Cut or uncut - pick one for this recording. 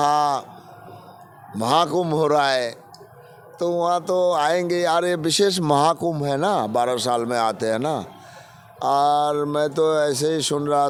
uncut